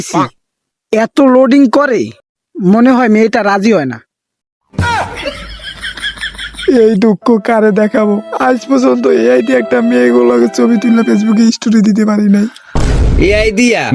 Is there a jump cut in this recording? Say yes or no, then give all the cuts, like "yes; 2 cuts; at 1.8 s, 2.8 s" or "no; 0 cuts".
no; 0 cuts